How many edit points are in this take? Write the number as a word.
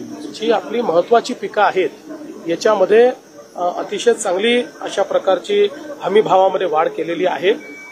zero